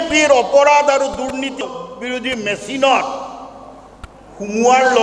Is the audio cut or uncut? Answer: cut